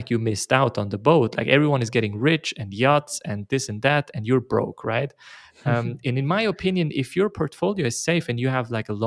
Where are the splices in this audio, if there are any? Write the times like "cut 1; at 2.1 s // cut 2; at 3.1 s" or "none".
none